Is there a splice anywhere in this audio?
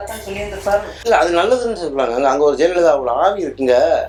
no; 0 cuts

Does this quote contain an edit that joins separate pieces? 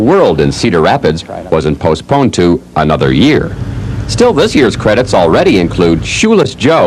yes; 1 cut; at 1.3 s

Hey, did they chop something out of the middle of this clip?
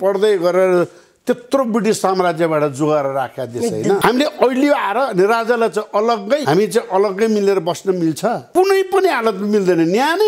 yes; 3 cuts; at 4.0 s, 6.4 s, 8.4 s

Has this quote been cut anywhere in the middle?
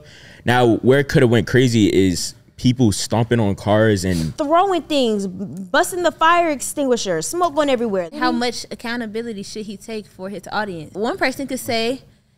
yes; 3 cuts; at 4.3 s, 8.1 s, 10.9 s

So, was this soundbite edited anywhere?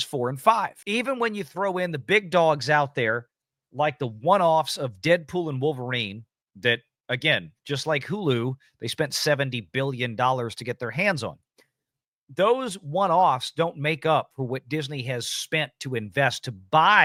no; 0 cuts

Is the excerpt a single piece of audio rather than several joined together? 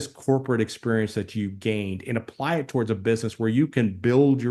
yes; 0 cuts

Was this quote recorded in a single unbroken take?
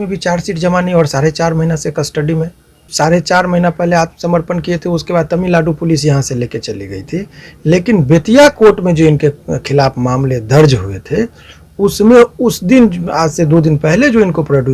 no; 1 cut; at 2.9 s

